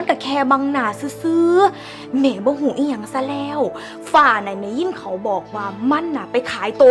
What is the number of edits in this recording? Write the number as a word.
zero